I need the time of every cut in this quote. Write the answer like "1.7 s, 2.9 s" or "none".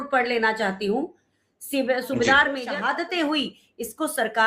2.7 s